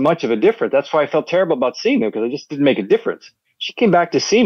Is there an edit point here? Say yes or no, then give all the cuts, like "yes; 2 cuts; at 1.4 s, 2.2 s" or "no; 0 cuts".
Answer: no; 0 cuts